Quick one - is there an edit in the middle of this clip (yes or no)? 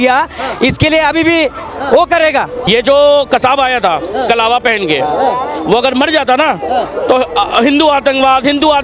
yes